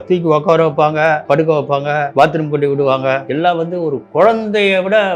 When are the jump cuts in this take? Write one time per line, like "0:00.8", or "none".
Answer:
0:01.2
0:02.1
0:03.3